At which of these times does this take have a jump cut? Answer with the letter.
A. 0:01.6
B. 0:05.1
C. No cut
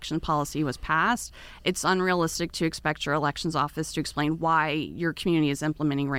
C